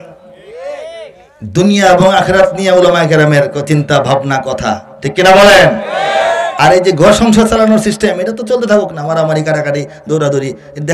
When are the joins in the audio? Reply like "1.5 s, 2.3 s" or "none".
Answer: none